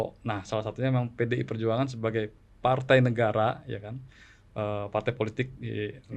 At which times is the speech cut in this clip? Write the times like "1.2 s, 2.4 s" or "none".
none